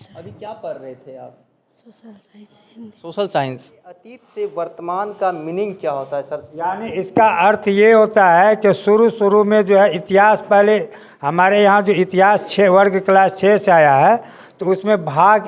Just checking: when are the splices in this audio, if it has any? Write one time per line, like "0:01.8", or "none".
0:04.2